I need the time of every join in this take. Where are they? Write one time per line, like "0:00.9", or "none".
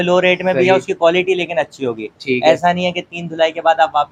none